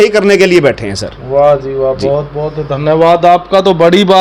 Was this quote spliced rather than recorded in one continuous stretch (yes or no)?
no